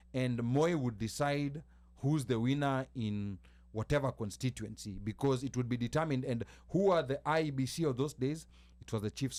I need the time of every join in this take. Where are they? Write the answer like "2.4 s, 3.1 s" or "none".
none